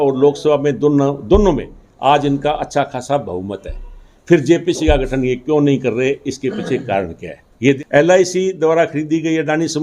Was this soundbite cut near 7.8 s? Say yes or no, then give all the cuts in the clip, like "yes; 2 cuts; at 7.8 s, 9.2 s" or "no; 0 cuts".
yes; 1 cut; at 7.8 s